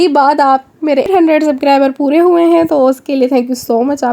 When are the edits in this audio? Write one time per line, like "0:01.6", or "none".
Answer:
0:01.1

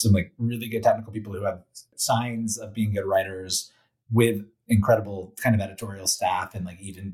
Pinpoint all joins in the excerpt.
0:01.9

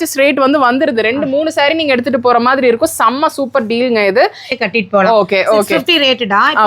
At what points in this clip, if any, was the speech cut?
0:04.5

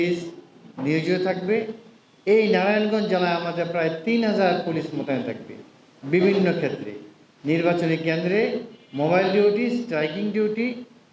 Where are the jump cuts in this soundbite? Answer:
none

